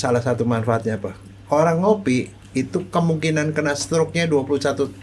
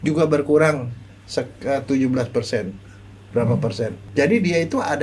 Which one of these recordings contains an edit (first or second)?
second